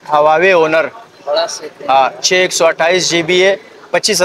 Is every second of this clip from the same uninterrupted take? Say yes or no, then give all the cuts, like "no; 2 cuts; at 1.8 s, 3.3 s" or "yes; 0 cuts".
yes; 0 cuts